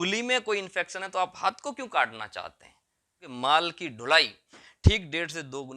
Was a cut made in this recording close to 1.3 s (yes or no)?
no